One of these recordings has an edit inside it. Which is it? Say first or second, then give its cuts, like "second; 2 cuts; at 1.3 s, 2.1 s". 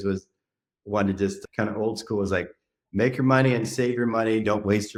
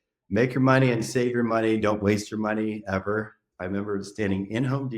second; 1 cut; at 3.4 s